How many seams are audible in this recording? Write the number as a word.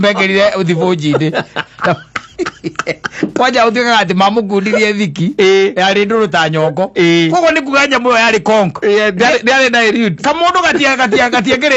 zero